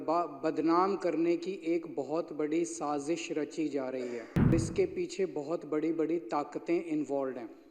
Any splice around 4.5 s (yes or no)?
yes